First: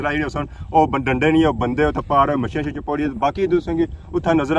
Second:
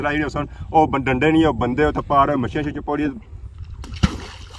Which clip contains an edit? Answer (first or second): second